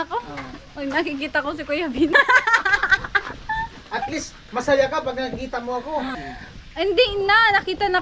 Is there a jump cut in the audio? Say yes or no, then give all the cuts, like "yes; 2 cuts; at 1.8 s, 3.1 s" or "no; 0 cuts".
yes; 2 cuts; at 2.1 s, 6.2 s